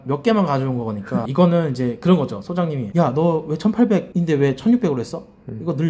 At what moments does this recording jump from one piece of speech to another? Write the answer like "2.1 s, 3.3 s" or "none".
1.3 s